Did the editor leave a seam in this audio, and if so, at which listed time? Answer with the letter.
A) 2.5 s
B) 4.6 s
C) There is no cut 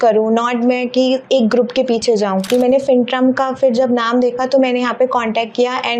A